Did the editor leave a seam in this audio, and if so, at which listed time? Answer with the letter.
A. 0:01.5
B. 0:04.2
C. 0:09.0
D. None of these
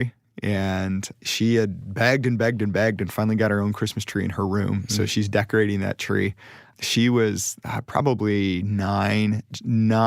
D